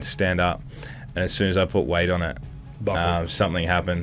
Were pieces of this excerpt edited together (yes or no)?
no